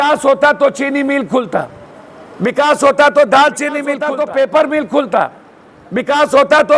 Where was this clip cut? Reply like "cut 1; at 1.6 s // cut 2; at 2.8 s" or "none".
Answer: cut 1; at 4.0 s